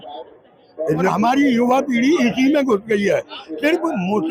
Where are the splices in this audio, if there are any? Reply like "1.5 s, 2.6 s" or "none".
1.1 s